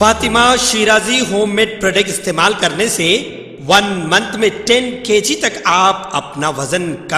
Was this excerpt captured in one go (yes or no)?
yes